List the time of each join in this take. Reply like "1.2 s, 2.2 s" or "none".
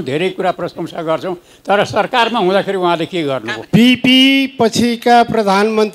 3.5 s

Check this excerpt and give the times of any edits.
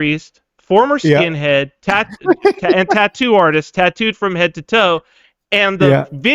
none

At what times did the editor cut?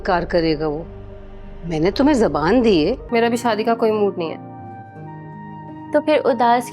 3.0 s

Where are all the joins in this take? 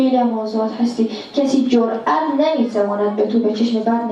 none

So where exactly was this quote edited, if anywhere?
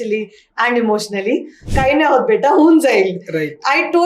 1.7 s

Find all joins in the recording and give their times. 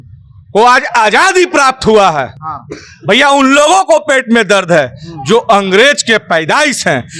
none

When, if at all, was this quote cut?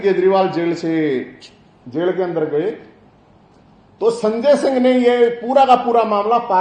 none

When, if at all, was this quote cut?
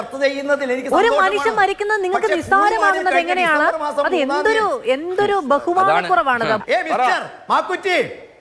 6.6 s

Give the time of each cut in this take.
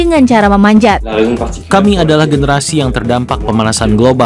1.2 s

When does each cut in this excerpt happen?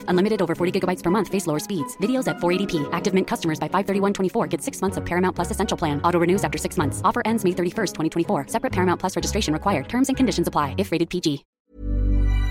11.5 s

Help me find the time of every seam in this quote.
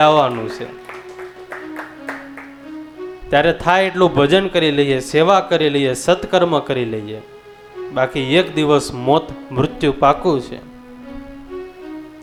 none

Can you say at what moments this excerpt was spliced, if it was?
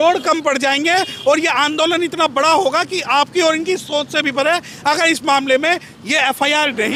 none

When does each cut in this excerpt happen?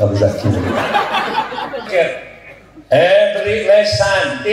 1.9 s

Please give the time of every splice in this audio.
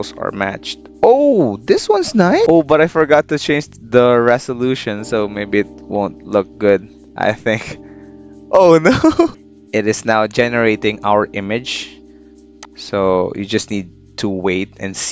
2.5 s, 9.3 s

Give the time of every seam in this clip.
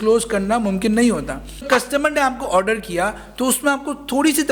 1.6 s

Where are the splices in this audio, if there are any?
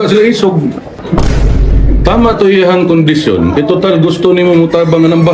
1.0 s

